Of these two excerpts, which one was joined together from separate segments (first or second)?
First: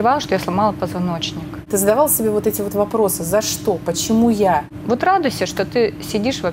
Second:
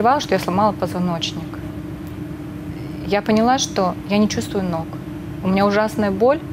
first